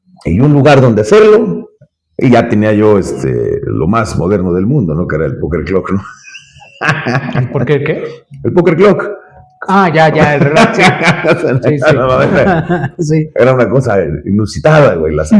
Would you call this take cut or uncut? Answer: uncut